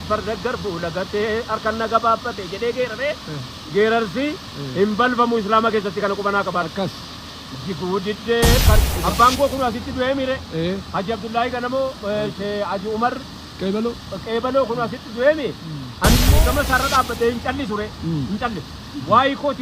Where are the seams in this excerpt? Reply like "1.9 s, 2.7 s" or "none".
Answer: 8.8 s, 16.3 s